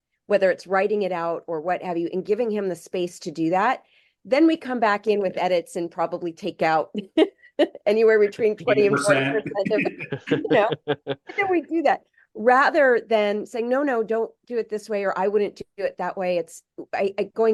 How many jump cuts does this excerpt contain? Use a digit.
0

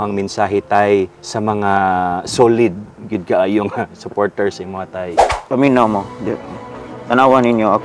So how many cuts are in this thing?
2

